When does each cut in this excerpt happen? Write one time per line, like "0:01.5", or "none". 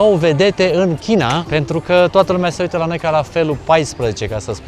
0:01.4